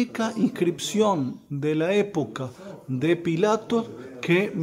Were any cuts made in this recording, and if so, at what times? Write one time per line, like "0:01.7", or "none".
none